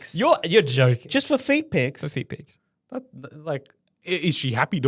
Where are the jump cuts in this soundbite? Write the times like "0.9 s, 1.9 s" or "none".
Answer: none